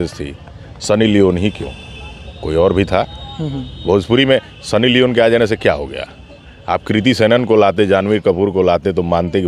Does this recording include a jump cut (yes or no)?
no